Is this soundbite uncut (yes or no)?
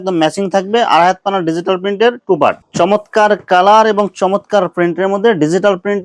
no